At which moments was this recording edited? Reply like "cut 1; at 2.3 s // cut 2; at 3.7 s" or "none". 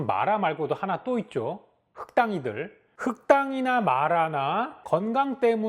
cut 1; at 2.8 s